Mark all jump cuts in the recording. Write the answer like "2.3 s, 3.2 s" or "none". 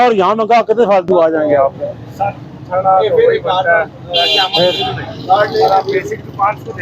none

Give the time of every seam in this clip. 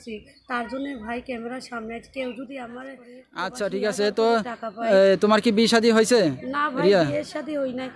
3.2 s

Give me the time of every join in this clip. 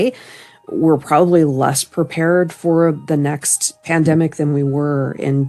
none

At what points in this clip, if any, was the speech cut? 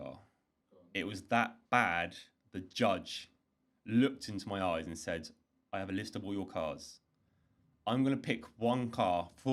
none

